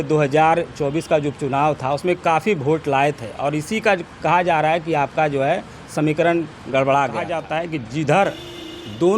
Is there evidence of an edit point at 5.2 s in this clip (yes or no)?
no